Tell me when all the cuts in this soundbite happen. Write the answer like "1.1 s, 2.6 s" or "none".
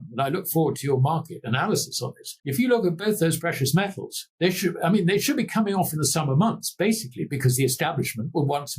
2.3 s